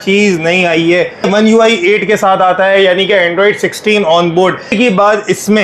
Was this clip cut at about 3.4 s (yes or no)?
no